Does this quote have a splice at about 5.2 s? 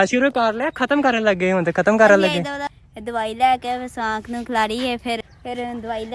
yes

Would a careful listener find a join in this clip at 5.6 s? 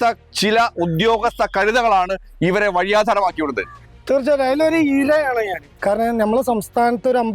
yes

